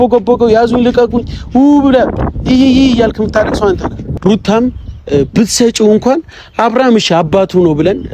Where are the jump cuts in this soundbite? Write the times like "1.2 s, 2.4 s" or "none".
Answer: 4.1 s